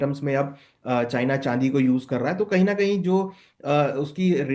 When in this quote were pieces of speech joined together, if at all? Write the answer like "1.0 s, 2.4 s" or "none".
none

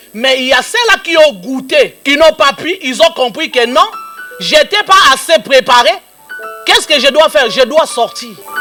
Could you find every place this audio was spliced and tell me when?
none

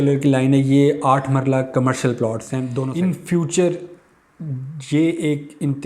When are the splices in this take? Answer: 2.7 s

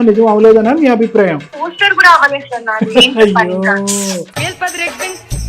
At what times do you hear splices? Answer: 1.5 s, 4.3 s

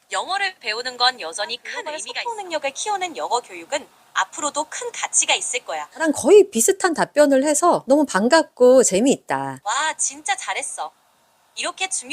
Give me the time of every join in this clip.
2.0 s, 6.0 s

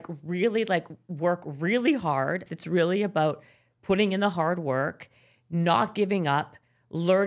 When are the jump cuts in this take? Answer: 2.5 s

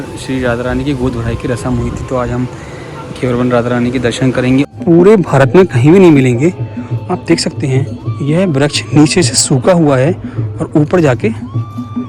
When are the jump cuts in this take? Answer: 4.7 s

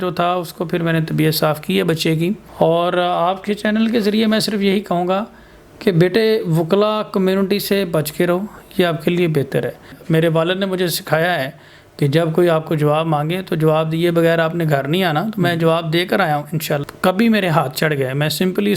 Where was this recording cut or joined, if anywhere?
2.4 s, 9.9 s, 16.8 s

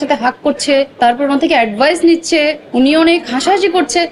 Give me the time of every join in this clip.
none

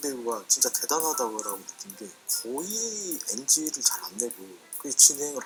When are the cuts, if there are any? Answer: none

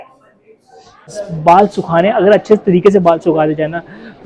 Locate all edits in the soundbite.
1.2 s

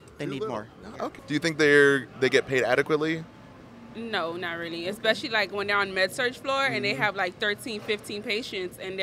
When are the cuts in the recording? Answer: 1.2 s

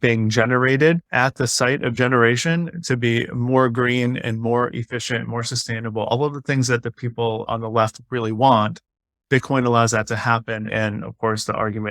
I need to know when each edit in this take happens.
1.1 s, 7.5 s, 10.7 s

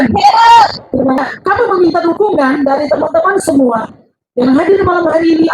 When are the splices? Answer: 1.2 s

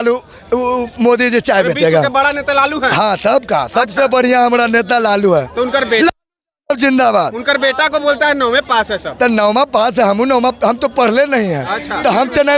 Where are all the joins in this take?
none

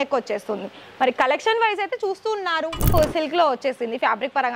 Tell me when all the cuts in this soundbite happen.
2.9 s

